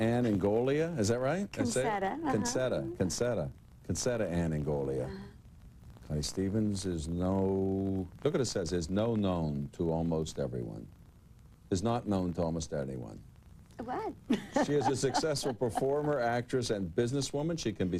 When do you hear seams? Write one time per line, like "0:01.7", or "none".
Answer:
0:10.2